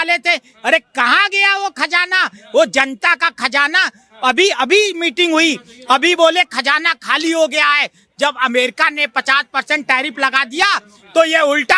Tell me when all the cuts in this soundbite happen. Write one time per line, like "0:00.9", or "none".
none